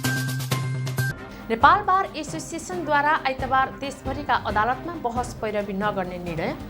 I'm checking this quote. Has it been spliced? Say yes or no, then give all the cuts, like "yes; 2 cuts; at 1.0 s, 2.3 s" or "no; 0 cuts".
no; 0 cuts